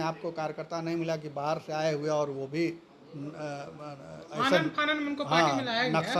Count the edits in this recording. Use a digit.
0